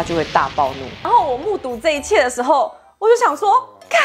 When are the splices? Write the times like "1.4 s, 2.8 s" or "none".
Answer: 0.9 s

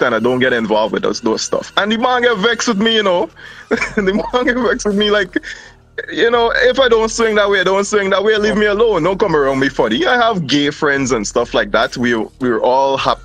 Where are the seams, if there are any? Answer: none

